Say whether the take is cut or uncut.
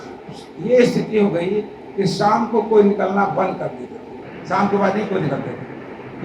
uncut